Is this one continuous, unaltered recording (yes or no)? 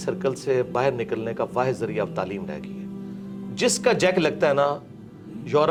yes